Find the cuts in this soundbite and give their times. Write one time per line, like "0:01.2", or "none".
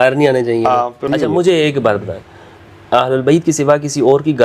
0:01.0